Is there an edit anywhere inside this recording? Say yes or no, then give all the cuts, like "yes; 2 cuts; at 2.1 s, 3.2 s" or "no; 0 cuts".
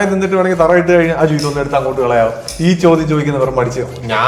no; 0 cuts